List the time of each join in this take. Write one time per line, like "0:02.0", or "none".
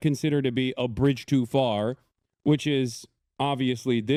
none